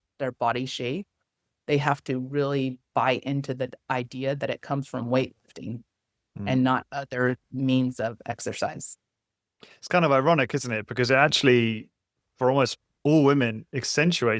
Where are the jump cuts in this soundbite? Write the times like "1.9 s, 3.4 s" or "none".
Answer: none